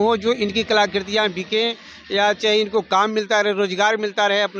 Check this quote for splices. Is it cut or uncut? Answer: uncut